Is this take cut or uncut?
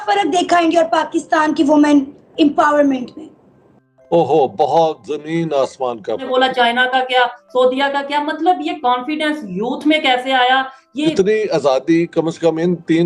cut